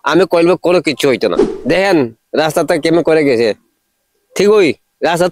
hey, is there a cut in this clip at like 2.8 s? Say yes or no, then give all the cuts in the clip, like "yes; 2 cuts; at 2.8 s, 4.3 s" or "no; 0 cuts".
no; 1 cut; at 1.5 s